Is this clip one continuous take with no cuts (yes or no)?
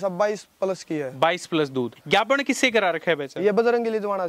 no